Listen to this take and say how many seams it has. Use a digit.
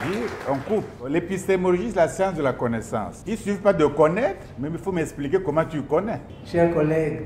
3